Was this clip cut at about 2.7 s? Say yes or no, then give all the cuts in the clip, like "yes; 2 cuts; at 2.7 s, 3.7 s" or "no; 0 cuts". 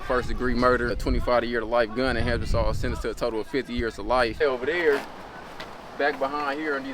no; 2 cuts; at 1.0 s, 4.4 s